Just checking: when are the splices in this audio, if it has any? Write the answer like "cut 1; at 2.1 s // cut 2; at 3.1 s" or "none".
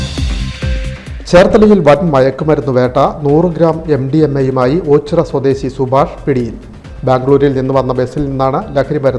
cut 1; at 0.9 s